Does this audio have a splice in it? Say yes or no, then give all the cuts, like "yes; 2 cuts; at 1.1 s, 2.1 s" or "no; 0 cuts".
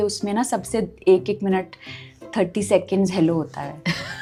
no; 0 cuts